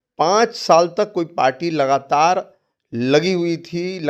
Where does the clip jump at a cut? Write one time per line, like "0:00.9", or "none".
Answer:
none